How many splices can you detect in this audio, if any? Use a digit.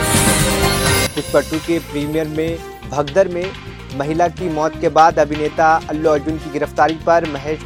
0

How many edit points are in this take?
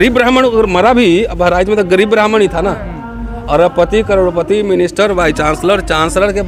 0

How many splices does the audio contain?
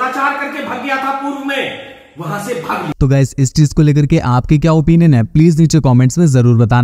0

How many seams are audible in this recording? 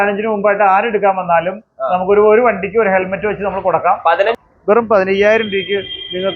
1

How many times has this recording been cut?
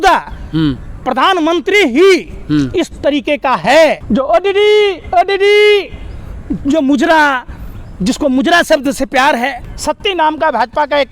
2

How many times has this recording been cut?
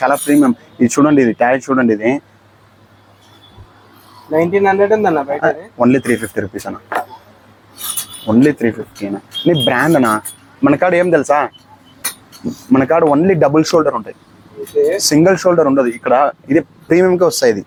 0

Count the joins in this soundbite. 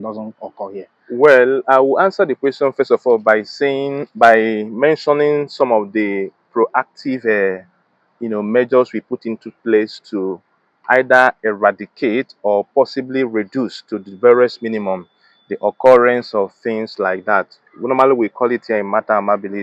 0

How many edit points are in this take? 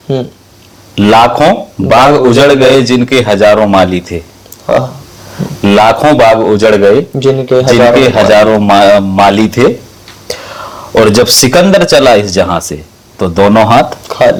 0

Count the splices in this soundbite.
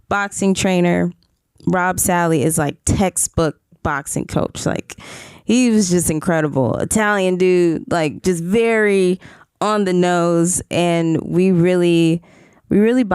0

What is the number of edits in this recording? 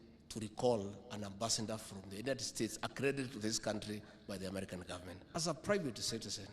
1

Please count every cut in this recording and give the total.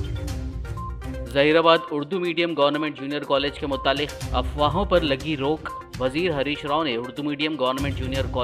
1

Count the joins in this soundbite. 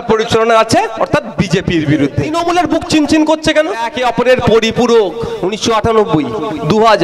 3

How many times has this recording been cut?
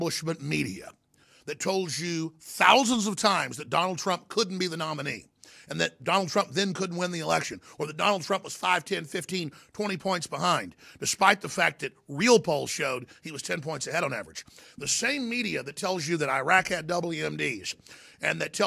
0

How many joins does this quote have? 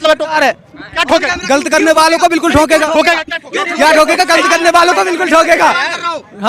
0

